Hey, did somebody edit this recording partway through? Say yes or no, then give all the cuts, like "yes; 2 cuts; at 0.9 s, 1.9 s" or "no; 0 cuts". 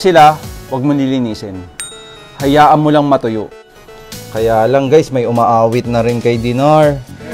yes; 1 cut; at 3.6 s